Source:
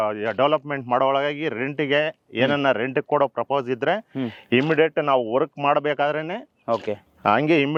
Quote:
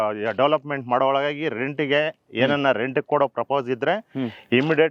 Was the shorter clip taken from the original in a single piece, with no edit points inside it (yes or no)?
yes